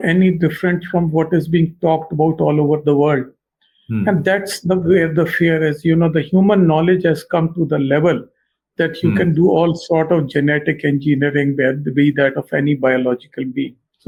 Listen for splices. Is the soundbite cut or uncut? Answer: uncut